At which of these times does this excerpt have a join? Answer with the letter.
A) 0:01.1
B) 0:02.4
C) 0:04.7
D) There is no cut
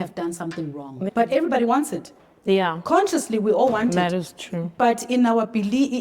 A